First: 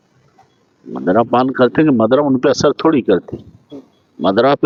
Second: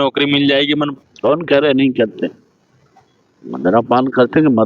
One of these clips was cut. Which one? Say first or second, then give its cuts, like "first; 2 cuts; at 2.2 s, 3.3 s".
second; 1 cut; at 1.0 s